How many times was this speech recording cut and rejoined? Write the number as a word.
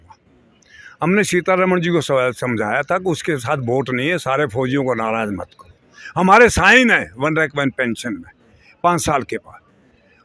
zero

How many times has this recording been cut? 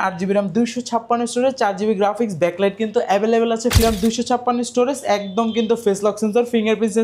one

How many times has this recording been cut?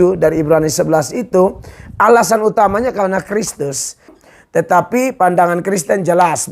one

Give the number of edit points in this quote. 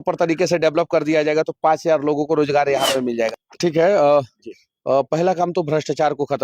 one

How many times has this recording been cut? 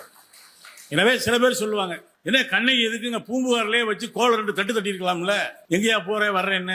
two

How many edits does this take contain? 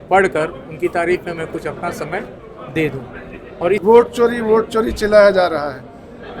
one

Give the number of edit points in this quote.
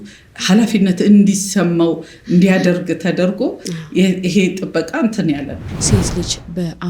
one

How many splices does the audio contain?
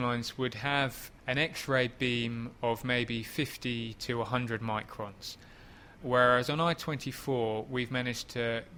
zero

